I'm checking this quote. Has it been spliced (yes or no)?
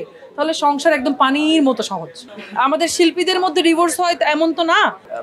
yes